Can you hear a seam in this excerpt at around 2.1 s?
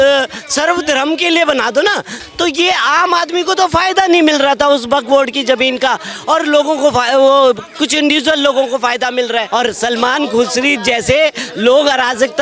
yes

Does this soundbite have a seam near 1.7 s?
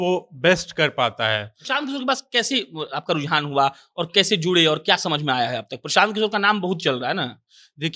yes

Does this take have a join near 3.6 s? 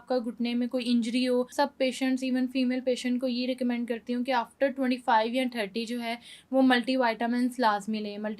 no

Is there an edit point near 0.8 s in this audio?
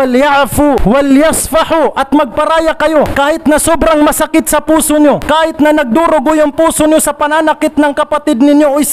yes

